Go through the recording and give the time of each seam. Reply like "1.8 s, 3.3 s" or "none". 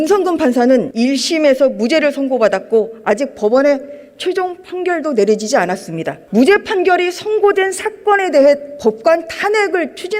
0.9 s, 6.2 s